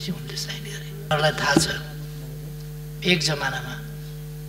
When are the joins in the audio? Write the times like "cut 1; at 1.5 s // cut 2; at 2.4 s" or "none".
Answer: cut 1; at 1.1 s